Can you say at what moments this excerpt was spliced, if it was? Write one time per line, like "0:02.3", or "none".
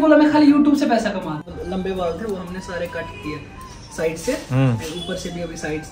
0:01.4